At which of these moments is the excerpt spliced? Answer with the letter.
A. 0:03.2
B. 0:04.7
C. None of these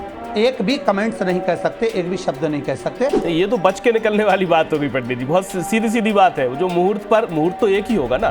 A